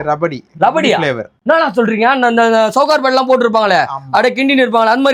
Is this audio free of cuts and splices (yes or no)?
yes